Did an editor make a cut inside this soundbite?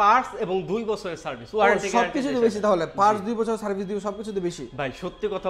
no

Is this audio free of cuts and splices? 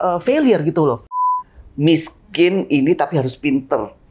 no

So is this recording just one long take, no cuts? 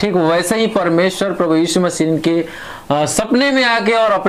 yes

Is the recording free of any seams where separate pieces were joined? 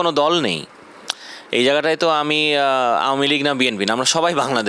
yes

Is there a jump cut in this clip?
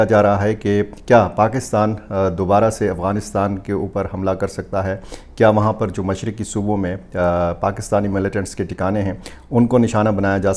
no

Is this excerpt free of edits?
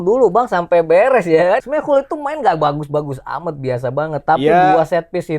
no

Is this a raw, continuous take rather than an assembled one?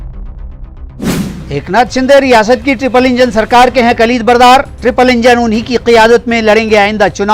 no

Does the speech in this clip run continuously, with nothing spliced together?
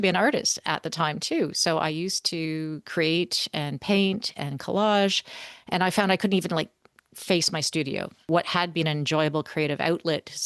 yes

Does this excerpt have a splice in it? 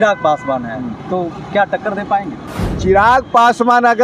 no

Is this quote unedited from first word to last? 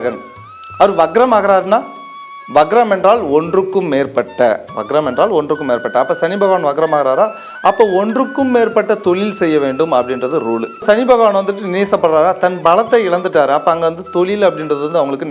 no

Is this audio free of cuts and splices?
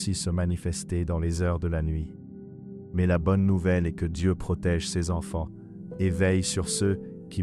yes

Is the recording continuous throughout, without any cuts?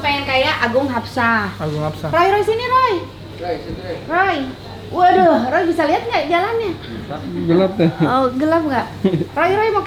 yes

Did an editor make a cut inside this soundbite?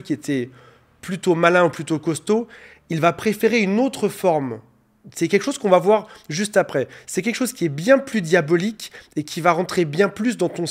no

